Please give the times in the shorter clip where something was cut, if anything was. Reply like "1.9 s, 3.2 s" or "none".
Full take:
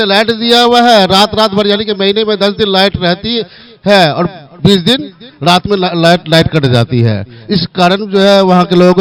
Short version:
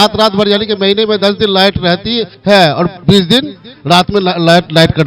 2.3 s, 3.0 s